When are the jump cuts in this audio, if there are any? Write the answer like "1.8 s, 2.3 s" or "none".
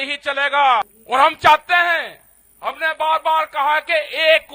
1.0 s